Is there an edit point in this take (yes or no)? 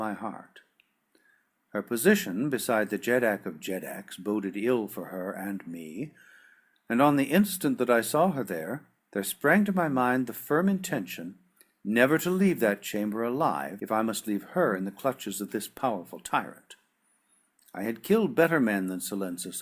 yes